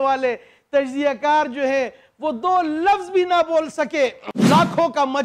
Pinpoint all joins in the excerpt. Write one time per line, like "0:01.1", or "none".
0:04.2